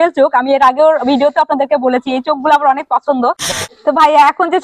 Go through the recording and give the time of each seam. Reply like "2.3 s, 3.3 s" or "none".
3.5 s